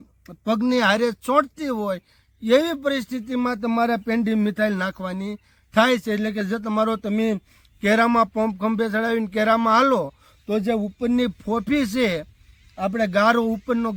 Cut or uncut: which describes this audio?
uncut